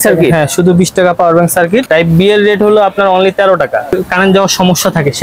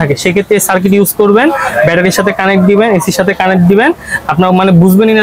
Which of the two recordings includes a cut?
first; 2 cuts; at 1.9 s, 3.9 s

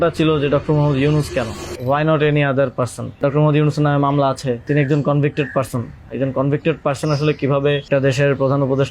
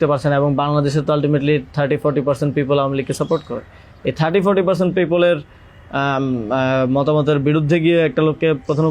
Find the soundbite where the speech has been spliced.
first; 4 cuts; at 1.6 s, 3.2 s, 4.6 s, 7.9 s

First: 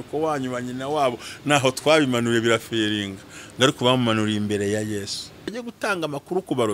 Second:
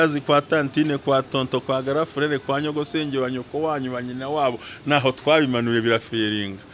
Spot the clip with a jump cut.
first; 1 cut; at 5.5 s

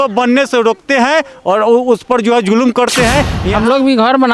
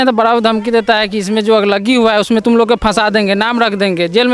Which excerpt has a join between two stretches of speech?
first; 1 cut; at 3.4 s

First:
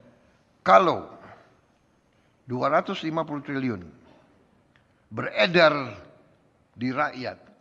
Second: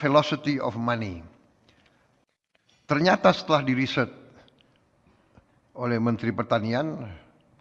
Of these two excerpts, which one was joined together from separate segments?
second; 1 cut; at 2.2 s

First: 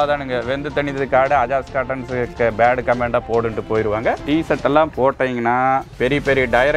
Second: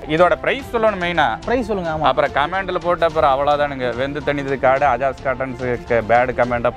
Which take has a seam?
first; 2 cuts; at 4.2 s, 5.9 s

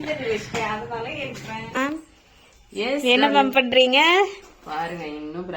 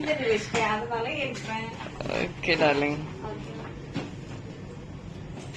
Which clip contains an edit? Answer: first; 1 cut; at 1.8 s

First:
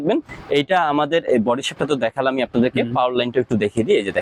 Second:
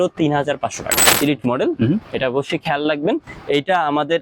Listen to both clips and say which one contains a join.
second; 1 cut; at 1.0 s

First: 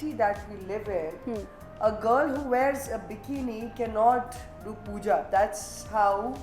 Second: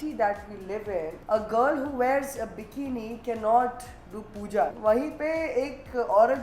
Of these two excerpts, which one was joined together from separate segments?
second; 2 cuts; at 1.2 s, 4.7 s

